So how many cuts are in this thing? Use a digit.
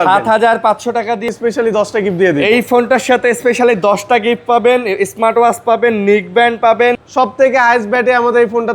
2